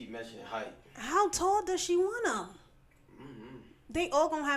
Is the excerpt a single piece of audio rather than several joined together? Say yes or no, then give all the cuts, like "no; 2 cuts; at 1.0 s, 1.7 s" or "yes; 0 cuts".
yes; 0 cuts